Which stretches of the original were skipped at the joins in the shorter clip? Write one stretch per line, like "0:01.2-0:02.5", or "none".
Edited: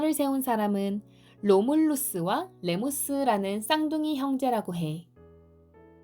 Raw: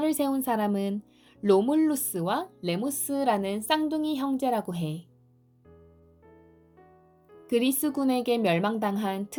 0:05.1-0:05.6